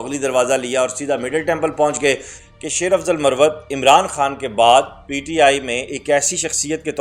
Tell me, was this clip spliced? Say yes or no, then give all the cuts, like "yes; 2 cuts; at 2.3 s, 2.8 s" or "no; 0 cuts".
yes; 1 cut; at 2.3 s